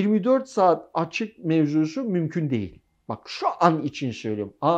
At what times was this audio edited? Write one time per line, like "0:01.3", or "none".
none